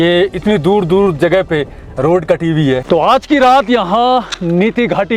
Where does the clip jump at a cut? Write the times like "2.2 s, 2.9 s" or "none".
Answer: 2.8 s